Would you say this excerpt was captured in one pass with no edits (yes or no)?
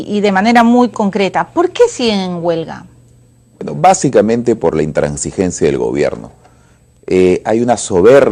yes